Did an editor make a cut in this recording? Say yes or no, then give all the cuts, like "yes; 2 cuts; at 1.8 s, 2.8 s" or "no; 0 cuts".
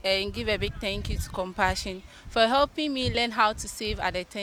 no; 0 cuts